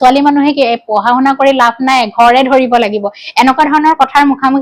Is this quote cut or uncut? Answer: uncut